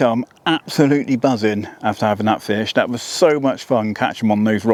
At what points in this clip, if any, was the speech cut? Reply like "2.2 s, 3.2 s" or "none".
none